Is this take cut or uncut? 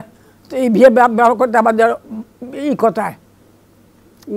uncut